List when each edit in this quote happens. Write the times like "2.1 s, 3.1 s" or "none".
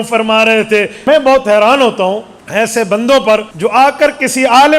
0.9 s, 2.3 s, 3.5 s

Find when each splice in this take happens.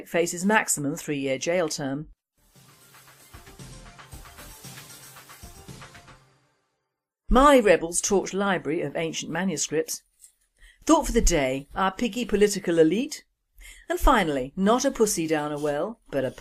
none

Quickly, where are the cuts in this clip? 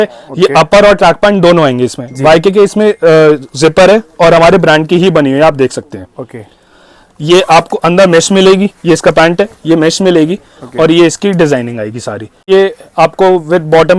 12.4 s

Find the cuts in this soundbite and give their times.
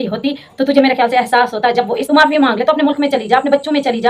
2.0 s

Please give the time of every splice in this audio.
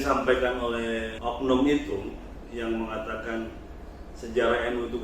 1.1 s

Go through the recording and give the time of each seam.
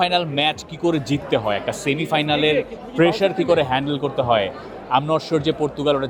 none

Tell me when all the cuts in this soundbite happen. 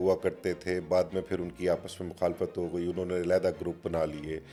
none

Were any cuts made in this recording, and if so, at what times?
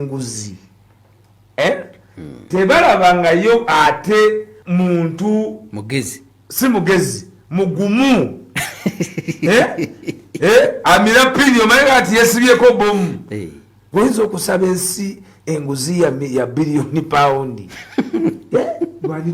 4.5 s

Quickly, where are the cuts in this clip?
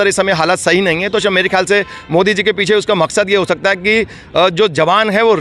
none

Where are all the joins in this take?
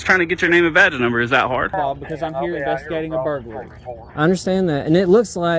1.7 s

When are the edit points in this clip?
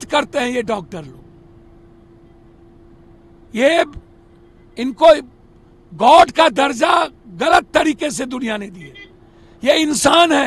none

